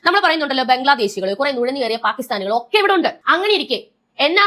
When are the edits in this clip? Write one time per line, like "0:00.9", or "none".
0:03.2